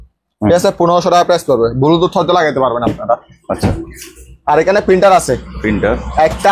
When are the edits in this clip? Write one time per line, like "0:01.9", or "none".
none

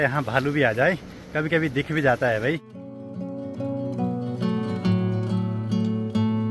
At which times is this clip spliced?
none

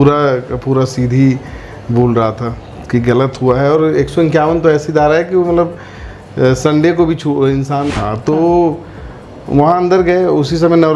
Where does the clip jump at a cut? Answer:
0:07.8

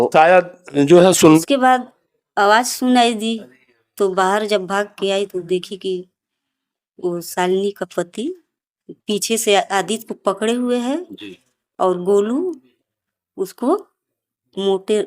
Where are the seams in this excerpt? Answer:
0:01.4

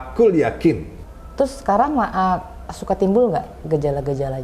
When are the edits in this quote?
0:00.9

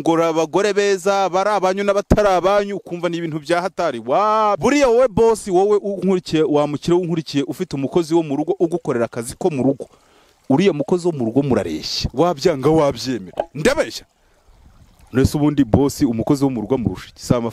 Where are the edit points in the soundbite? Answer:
0:04.6

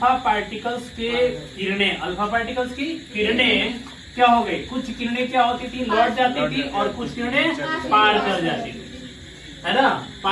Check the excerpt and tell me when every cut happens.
none

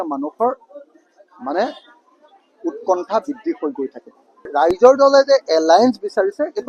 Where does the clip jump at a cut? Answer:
0:04.5

